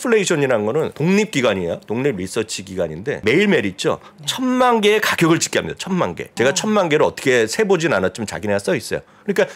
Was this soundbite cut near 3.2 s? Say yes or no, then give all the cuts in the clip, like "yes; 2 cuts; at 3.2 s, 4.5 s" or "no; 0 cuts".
yes; 3 cuts; at 0.9 s, 3.2 s, 6.2 s